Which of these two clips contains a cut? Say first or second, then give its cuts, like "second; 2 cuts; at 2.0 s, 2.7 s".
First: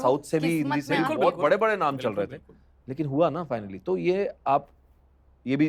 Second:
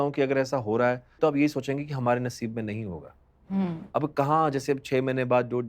second; 1 cut; at 1.2 s